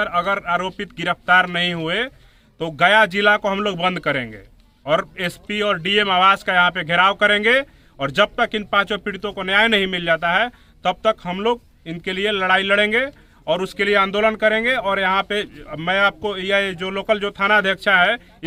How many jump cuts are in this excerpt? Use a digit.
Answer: 0